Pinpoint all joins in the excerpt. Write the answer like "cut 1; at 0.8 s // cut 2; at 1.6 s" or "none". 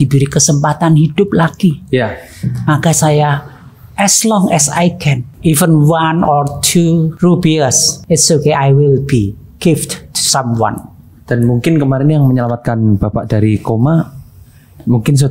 cut 1; at 5.3 s // cut 2; at 7.1 s // cut 3; at 7.9 s